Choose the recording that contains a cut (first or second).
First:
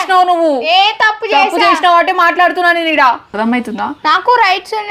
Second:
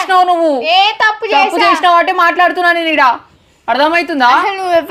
first